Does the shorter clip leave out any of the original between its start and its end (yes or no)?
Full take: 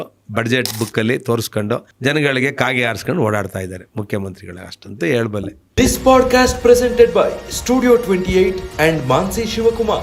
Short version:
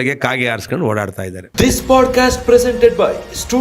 yes